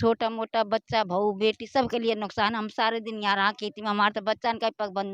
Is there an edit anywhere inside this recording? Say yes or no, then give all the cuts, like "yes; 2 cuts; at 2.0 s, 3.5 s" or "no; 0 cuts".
no; 0 cuts